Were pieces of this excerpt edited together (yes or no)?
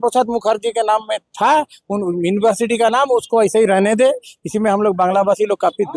no